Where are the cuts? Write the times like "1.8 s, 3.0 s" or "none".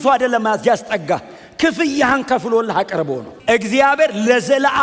3.3 s